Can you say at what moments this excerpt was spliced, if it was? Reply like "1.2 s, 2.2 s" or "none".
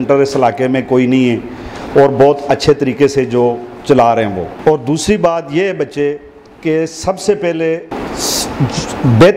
4.5 s, 7.9 s